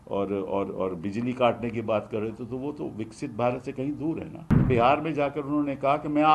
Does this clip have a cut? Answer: yes; 1 cut; at 4.6 s

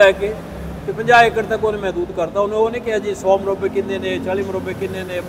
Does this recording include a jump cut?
no; 0 cuts

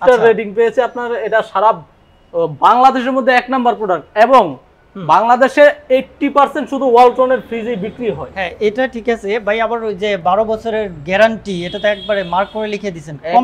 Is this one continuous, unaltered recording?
yes; 0 cuts

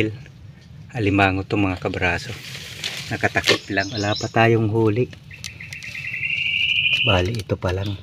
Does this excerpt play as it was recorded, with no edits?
no; 1 cut; at 3.9 s

